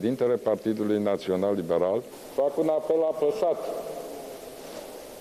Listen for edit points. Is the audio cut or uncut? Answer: cut